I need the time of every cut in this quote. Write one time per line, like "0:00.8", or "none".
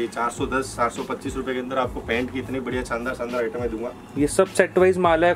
none